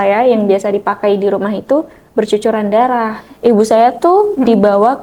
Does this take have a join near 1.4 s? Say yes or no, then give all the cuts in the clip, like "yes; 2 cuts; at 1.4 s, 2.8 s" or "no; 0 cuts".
no; 1 cut; at 3.2 s